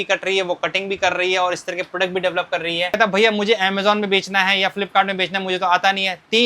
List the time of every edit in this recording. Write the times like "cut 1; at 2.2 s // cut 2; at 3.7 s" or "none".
cut 1; at 3.0 s